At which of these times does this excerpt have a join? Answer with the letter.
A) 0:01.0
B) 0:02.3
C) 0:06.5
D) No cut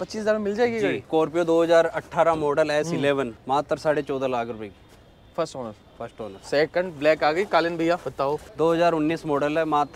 D